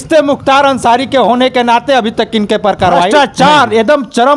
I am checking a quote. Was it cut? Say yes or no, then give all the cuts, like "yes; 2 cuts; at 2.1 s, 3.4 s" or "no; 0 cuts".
yes; 1 cut; at 3.1 s